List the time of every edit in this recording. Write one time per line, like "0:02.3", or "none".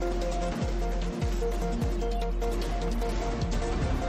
none